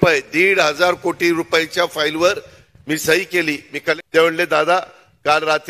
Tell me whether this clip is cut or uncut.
cut